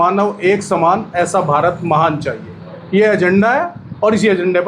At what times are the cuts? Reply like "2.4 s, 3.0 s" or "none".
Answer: none